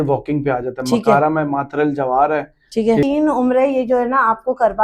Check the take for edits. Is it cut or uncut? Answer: cut